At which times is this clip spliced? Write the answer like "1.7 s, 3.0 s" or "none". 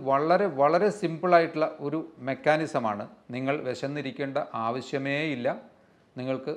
3.2 s